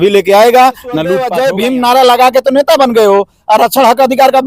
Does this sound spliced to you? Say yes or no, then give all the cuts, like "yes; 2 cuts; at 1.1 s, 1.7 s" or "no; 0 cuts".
yes; 1 cut; at 1.2 s